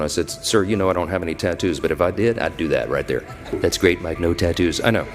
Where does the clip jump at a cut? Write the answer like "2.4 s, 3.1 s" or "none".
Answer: 3.5 s